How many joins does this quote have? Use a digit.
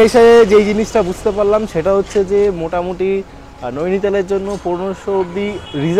0